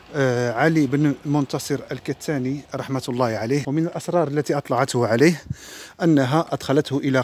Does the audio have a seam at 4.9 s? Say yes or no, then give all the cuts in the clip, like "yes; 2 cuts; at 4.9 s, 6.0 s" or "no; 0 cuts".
no; 1 cut; at 3.6 s